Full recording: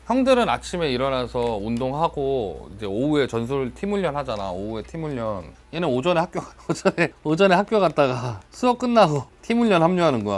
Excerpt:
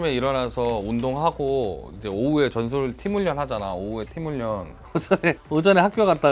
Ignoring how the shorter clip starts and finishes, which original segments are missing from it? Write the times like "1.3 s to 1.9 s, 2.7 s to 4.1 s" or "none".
5.6 s to 6.5 s